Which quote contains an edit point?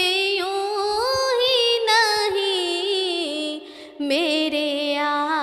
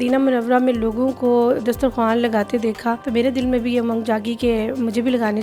second; 1 cut; at 3.0 s

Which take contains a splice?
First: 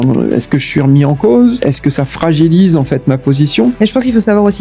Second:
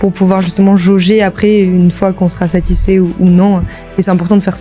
first; 2 cuts; at 1.7 s, 3.8 s

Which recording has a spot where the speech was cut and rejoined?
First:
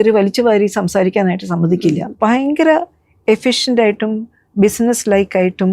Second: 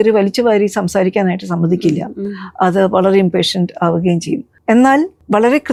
first; 1 cut; at 2.1 s

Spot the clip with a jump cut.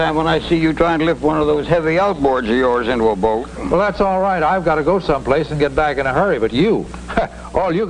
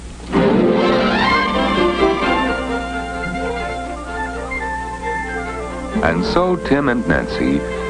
first; 1 cut; at 5.5 s

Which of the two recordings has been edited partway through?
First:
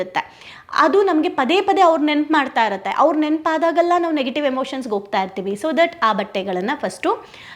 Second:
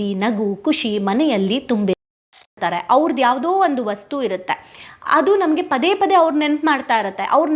second; 1 cut; at 2.1 s

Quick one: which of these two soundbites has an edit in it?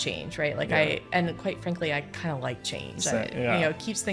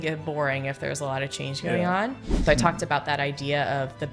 second; 1 cut; at 2.4 s

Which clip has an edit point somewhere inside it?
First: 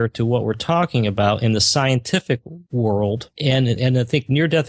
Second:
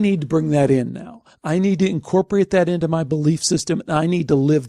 first; 2 cuts; at 2.6 s, 3.3 s

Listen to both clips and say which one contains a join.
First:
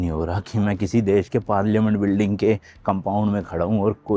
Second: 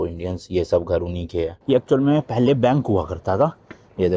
second; 1 cut; at 1.6 s

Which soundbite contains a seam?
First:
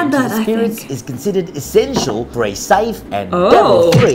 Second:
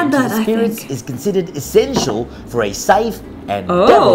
first; 2 cuts; at 2.3 s, 3.0 s

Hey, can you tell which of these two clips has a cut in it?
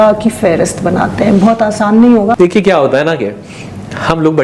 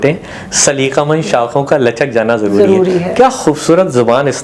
first; 1 cut; at 2.4 s

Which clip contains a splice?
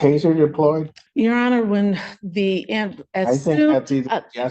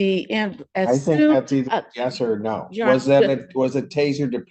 first; 1 cut; at 1.0 s

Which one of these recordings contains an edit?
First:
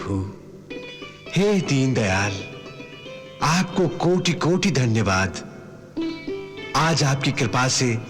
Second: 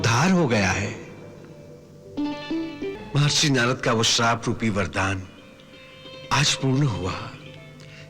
second; 1 cut; at 3.0 s

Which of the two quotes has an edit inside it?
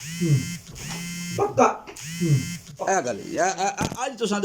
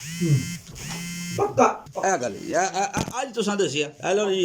second; 1 cut; at 1.9 s

